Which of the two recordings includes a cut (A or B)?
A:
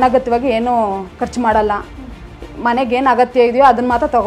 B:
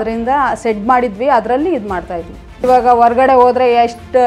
B